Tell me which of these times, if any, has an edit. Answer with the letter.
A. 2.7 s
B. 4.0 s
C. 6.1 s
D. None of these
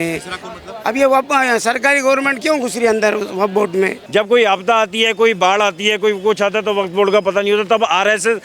B